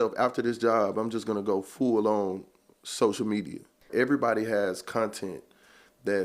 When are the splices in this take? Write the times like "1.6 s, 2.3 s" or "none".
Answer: 3.9 s